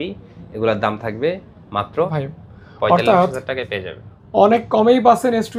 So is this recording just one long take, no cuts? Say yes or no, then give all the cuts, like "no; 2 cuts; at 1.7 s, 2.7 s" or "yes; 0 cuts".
no; 1 cut; at 2.1 s